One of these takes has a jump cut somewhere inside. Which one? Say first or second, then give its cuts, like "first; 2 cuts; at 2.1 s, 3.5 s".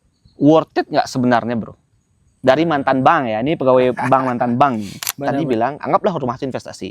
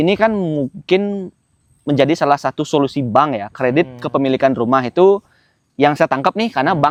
first; 1 cut; at 5.2 s